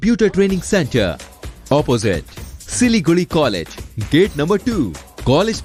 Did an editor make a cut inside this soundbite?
no; 0 cuts

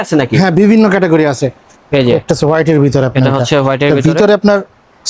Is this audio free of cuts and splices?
yes; 0 cuts

